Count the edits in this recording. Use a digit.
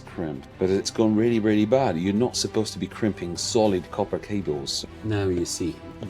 1